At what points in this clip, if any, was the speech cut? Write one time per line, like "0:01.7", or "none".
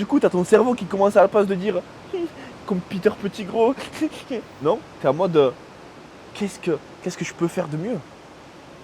none